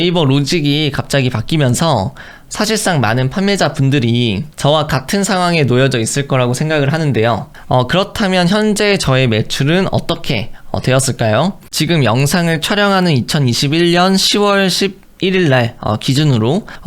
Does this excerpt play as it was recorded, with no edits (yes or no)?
no